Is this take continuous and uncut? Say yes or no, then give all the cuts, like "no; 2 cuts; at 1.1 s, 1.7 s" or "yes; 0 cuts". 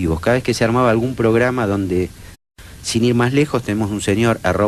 yes; 0 cuts